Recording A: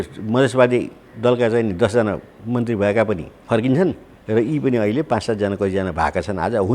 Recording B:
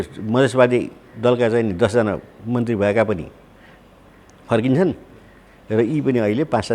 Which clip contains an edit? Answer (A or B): A